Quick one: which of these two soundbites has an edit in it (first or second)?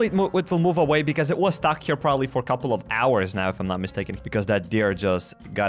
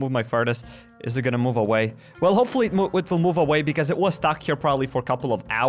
first